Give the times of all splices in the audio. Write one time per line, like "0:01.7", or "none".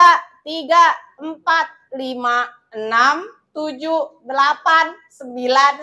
none